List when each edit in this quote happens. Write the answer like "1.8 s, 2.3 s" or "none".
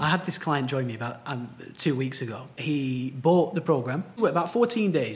2.6 s, 4.2 s

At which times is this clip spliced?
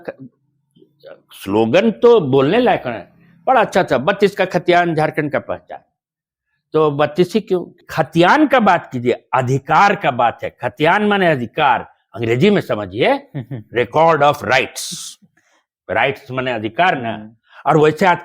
7.8 s

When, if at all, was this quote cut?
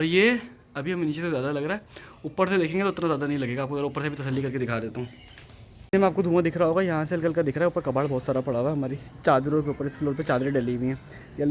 none

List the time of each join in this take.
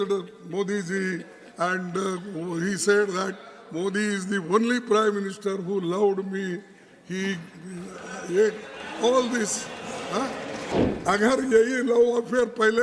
10.7 s

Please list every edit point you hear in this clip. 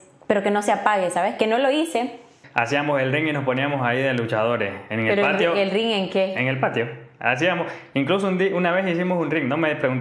2.4 s

